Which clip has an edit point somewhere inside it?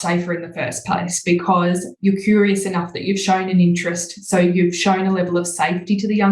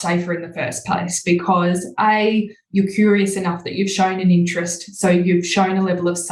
first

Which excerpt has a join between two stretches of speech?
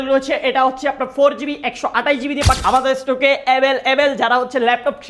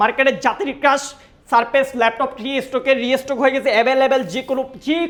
first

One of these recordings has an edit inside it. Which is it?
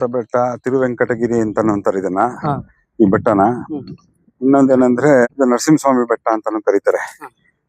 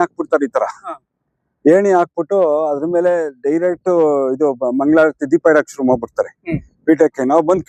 first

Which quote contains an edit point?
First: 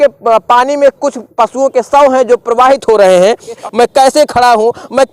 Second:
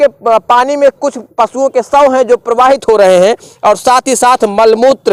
first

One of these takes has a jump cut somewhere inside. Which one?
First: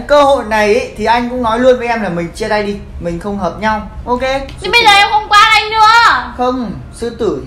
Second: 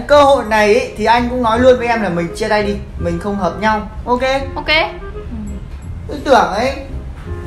first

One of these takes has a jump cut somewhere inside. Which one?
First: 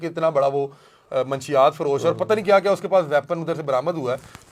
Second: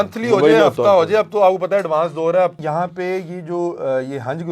second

